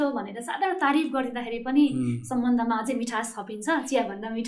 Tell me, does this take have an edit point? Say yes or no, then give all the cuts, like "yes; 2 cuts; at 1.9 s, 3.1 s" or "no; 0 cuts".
no; 0 cuts